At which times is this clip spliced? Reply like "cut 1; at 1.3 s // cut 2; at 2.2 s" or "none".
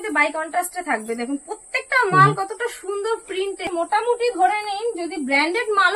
cut 1; at 3.6 s

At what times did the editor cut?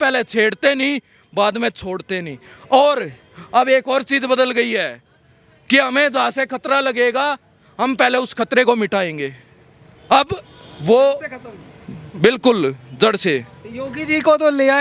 none

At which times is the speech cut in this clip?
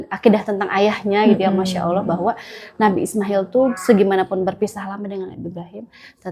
none

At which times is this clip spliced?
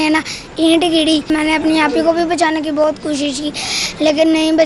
cut 1; at 1.3 s

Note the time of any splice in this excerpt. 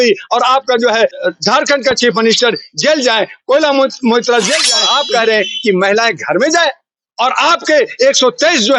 cut 1; at 1.2 s // cut 2; at 4.7 s

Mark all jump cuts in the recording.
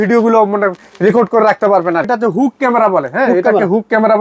cut 1; at 2.1 s

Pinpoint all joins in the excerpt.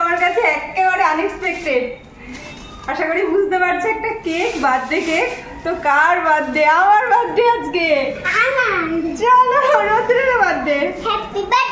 none

